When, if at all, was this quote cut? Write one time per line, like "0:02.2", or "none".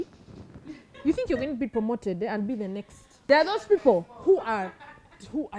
0:03.2

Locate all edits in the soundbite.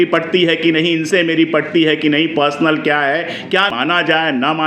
0:03.7

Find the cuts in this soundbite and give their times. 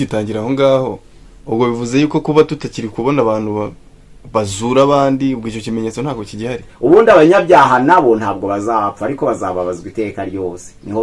0:06.6

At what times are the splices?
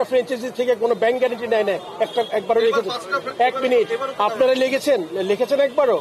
none

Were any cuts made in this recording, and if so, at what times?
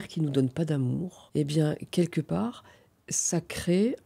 0:01.2

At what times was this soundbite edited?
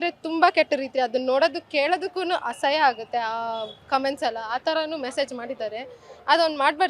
none

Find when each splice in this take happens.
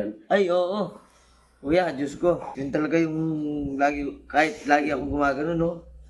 0:02.5

